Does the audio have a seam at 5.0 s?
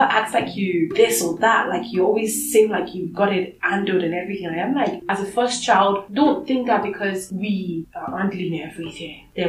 yes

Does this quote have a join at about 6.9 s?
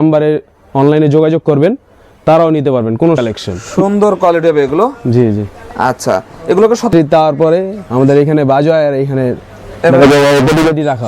yes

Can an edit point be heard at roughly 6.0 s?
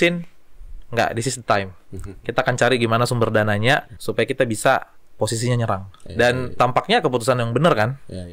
yes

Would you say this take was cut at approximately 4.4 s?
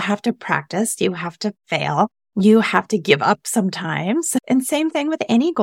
yes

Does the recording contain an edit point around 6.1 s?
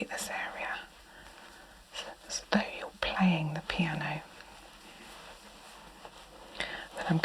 yes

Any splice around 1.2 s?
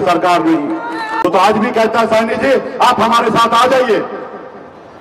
yes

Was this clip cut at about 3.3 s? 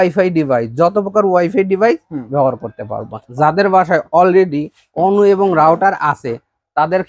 yes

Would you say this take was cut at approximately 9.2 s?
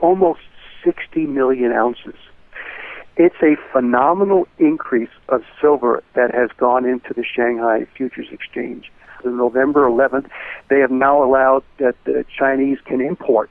yes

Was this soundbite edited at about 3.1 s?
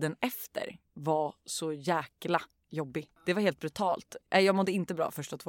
yes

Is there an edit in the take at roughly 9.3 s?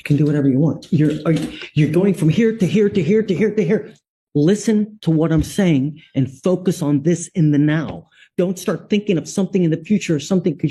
no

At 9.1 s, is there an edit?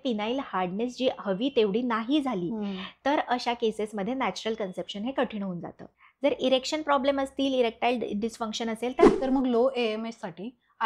yes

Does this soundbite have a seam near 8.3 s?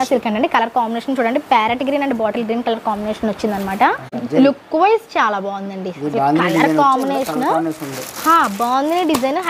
no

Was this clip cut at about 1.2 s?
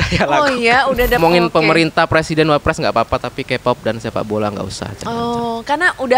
yes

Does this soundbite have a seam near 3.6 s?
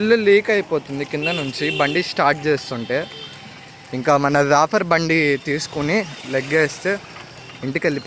no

